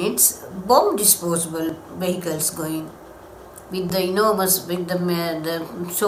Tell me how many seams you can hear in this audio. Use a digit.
0